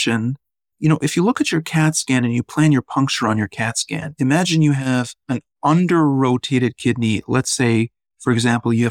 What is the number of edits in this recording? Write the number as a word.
one